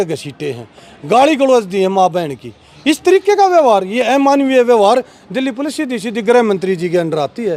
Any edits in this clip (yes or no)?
no